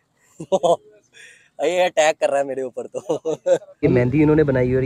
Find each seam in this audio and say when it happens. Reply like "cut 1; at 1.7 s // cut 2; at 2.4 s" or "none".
cut 1; at 3.8 s